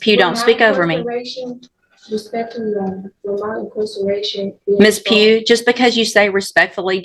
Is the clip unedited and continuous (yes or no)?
yes